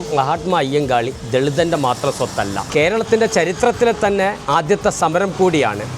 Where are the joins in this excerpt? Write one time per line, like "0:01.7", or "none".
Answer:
0:02.6